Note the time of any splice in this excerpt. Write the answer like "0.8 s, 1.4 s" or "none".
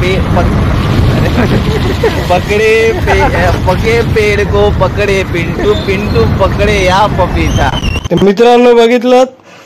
7.8 s